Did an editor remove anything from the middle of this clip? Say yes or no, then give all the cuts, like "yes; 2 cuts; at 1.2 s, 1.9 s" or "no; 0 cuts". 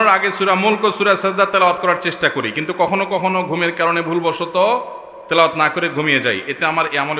no; 0 cuts